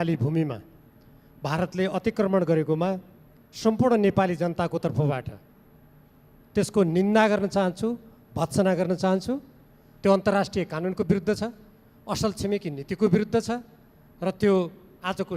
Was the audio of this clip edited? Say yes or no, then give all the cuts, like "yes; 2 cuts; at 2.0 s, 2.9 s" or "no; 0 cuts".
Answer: no; 0 cuts